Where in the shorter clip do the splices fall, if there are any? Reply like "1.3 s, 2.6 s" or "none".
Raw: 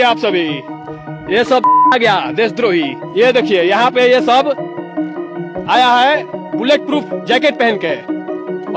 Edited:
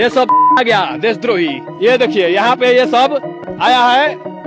3.4 s

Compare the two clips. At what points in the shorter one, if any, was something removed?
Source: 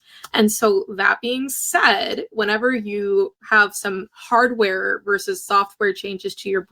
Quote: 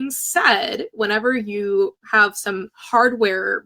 none

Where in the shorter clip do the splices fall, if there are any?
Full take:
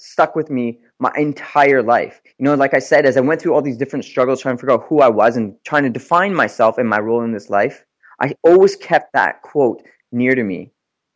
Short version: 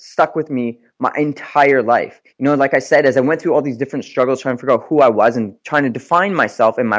none

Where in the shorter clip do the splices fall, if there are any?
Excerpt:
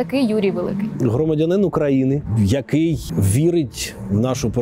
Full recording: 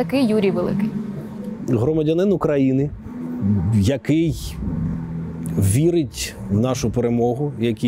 0.9 s, 2.3 s, 3.1 s

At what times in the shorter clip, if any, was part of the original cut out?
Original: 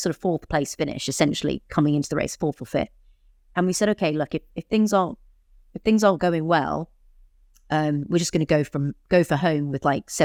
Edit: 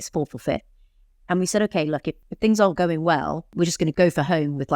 2.2 s, 3.8 s

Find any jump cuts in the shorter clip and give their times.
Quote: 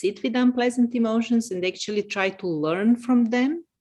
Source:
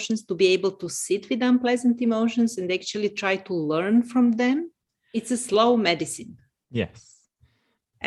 none

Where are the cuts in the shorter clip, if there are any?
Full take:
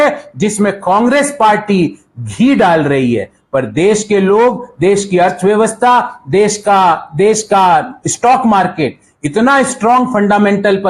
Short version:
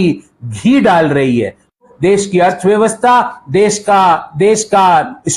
1.9 s

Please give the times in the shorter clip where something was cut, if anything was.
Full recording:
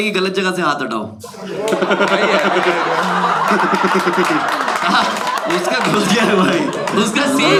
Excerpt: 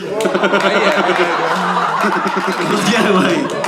2.6 s

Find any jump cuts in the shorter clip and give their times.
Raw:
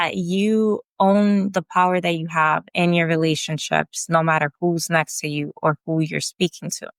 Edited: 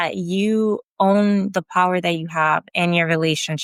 none

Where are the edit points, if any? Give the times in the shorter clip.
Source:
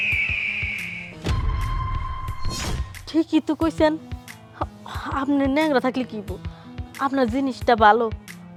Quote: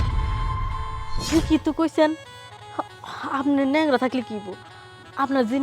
1.3 s

